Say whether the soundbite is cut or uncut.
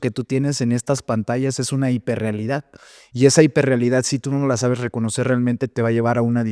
uncut